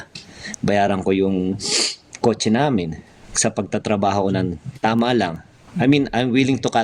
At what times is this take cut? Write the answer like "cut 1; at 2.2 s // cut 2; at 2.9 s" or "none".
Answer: none